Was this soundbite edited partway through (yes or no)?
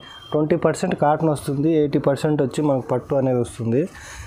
no